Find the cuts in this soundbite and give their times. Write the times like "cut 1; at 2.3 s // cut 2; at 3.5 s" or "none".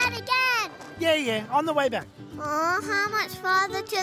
cut 1; at 2.1 s